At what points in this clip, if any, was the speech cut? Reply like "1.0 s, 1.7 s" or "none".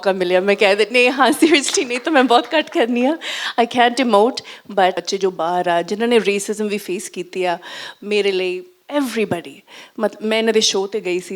5.0 s